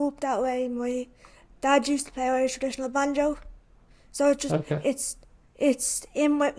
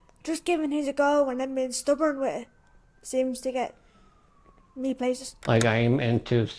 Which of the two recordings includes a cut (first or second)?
second